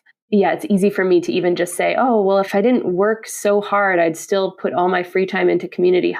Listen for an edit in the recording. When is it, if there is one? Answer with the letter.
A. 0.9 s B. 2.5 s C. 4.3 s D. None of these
B